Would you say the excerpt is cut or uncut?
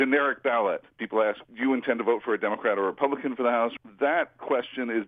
cut